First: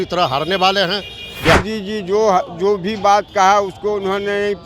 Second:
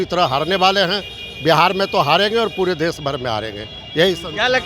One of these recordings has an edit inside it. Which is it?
first; 1 cut; at 1.6 s

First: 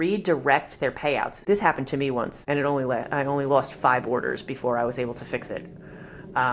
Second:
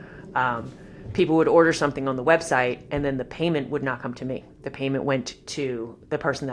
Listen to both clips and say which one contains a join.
first; 2 cuts; at 1.4 s, 2.4 s

